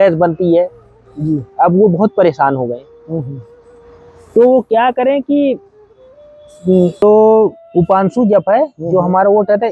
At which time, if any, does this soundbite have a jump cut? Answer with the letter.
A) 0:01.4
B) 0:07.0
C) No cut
B